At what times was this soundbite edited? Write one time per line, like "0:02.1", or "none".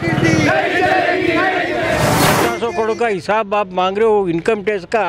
0:02.2